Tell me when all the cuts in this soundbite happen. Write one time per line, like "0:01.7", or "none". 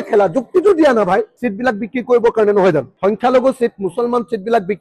0:01.4